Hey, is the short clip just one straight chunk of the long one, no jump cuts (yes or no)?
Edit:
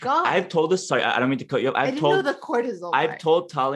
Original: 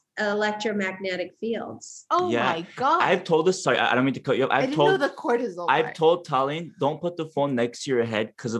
yes